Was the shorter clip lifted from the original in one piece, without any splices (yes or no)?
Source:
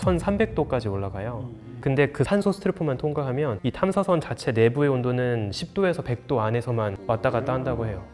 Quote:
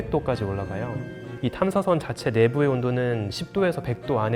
no